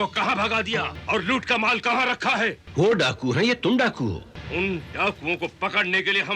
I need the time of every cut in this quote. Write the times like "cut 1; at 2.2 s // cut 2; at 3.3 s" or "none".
cut 1; at 0.9 s // cut 2; at 2.6 s // cut 3; at 4.3 s